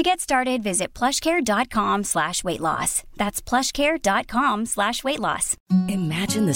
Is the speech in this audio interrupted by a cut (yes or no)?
yes